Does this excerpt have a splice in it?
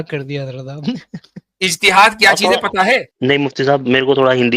yes; 1 cut; at 3.1 s

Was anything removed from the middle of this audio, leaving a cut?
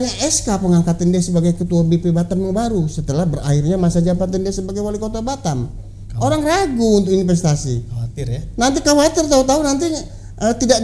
no; 0 cuts

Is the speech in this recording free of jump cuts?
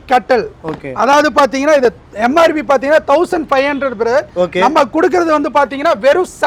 yes; 0 cuts

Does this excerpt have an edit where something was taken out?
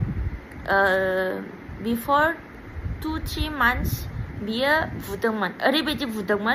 no; 0 cuts

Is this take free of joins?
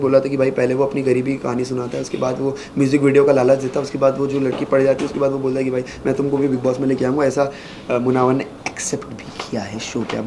yes; 0 cuts

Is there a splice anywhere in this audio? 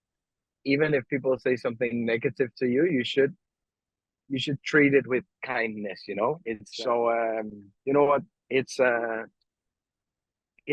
yes; 1 cut; at 6.7 s

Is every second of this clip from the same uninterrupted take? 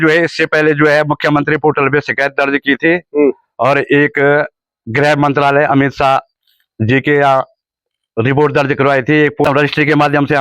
no; 1 cut; at 9.5 s

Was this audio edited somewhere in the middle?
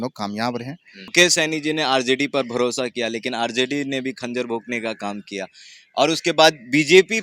yes; 1 cut; at 1.1 s

